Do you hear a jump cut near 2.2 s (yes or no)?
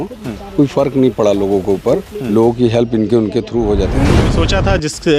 no